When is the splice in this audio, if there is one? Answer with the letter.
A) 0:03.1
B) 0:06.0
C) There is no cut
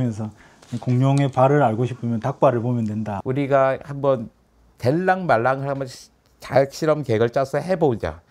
A